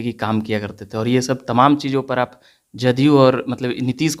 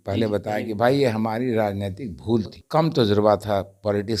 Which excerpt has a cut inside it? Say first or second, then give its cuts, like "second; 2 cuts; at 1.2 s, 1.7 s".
second; 1 cut; at 2.6 s